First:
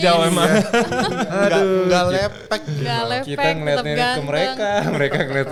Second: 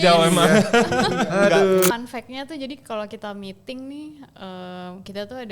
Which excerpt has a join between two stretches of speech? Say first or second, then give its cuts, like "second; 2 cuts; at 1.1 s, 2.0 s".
second; 1 cut; at 1.9 s